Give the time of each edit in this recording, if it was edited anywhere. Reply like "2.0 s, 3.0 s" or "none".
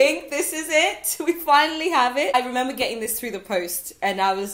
2.3 s